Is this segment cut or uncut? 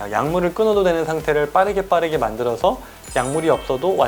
uncut